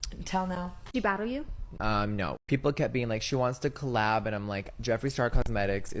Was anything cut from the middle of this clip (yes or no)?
yes